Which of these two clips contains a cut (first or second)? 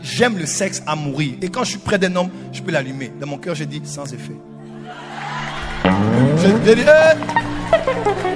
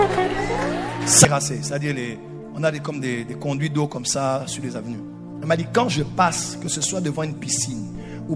second